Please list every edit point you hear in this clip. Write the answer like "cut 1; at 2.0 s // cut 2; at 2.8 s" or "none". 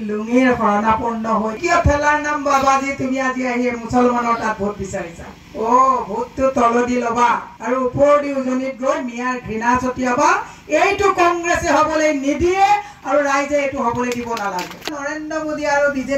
cut 1; at 1.6 s // cut 2; at 5.4 s // cut 3; at 14.8 s